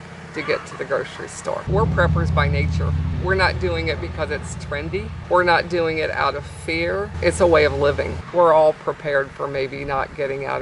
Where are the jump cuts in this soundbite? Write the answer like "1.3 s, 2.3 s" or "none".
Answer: 1.7 s, 8.1 s